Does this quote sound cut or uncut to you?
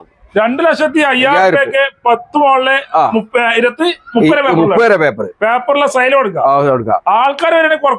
uncut